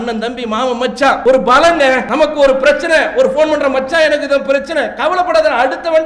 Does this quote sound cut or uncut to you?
cut